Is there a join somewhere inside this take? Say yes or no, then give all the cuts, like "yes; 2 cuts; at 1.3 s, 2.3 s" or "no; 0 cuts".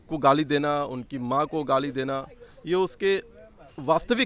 no; 0 cuts